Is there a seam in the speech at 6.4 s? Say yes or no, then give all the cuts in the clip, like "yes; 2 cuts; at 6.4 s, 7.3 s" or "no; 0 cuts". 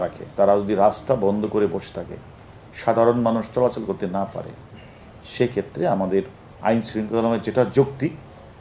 yes; 1 cut; at 6.4 s